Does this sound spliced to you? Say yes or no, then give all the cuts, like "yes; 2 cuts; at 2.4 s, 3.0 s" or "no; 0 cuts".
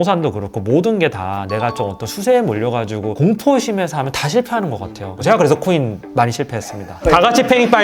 no; 0 cuts